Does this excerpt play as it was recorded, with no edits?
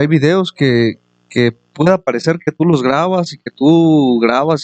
yes; 0 cuts

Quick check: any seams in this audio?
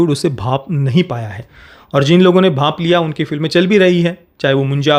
no; 0 cuts

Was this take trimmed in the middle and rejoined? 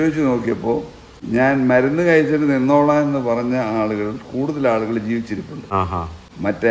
no; 0 cuts

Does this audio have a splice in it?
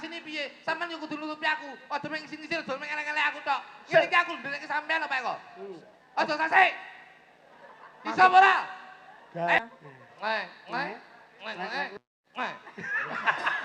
yes; 1 cut; at 9.6 s

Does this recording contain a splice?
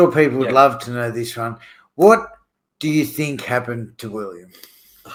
no; 0 cuts

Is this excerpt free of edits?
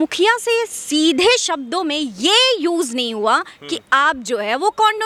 yes; 0 cuts

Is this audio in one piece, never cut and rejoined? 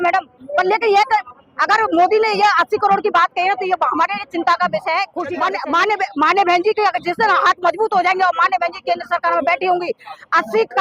no; 1 cut; at 5.5 s

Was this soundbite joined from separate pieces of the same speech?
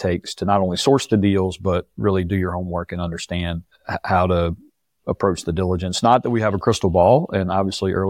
yes; 1 cut; at 3.7 s

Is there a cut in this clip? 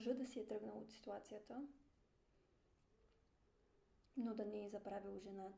no; 0 cuts

